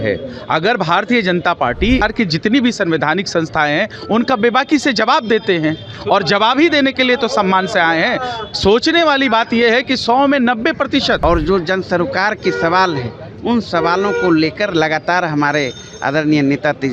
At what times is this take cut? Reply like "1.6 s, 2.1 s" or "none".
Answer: 2.0 s, 11.2 s